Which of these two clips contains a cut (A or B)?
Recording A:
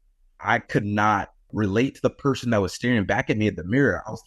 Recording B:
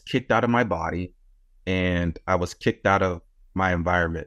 A